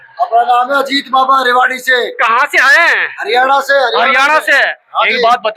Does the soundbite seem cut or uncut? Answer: uncut